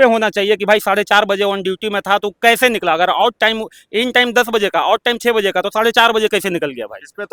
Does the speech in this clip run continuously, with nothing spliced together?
yes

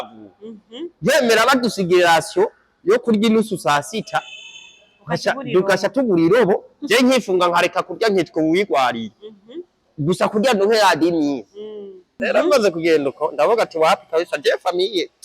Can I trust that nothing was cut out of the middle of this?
no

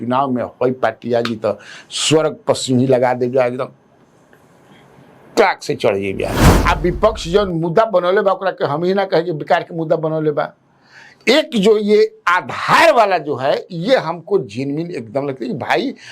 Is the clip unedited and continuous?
no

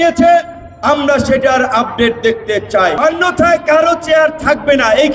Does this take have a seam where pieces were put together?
yes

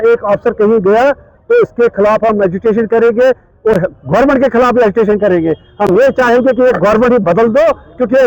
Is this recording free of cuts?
yes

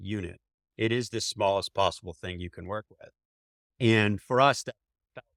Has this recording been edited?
no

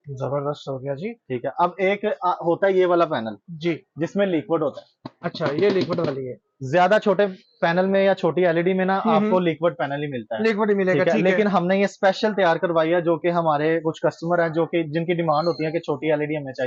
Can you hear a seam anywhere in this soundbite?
no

